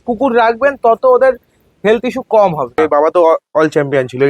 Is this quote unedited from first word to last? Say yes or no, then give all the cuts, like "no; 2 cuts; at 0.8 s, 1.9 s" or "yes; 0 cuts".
no; 1 cut; at 2.8 s